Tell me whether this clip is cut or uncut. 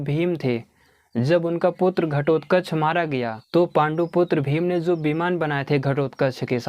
cut